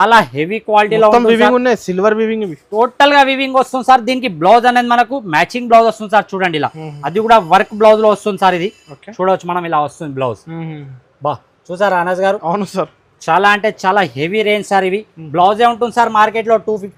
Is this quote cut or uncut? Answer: uncut